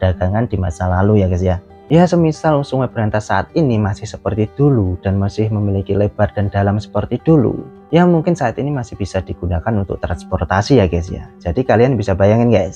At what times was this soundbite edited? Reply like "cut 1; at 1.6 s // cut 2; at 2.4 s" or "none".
cut 1; at 1.7 s // cut 2; at 7.7 s